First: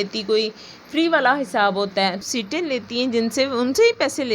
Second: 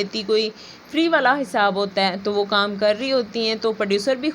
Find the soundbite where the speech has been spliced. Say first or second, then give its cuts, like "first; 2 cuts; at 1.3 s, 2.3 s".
first; 1 cut; at 2.2 s